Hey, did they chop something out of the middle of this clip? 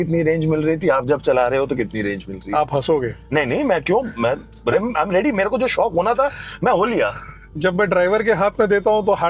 no; 0 cuts

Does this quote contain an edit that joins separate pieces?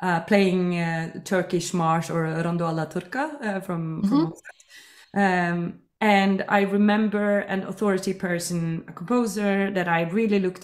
no; 0 cuts

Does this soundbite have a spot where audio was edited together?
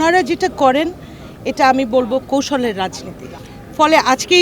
no; 0 cuts

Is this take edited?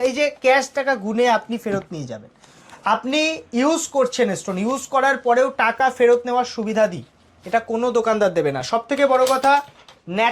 no; 0 cuts

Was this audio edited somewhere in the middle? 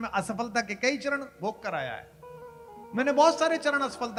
no; 0 cuts

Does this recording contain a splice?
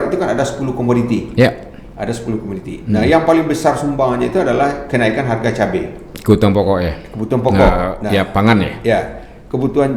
no; 0 cuts

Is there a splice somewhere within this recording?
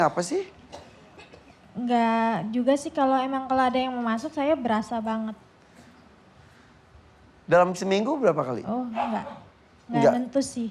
no; 0 cuts

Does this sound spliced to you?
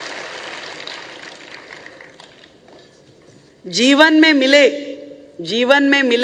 no; 0 cuts

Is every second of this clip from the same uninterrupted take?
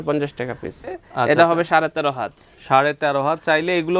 no; 1 cut; at 0.9 s

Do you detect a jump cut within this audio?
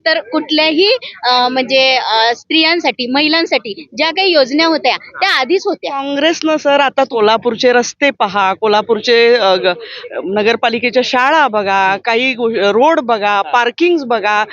yes; 2 cuts; at 6.1 s, 7.1 s

